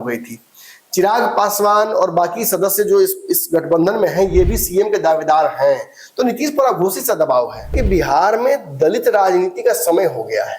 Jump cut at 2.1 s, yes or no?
no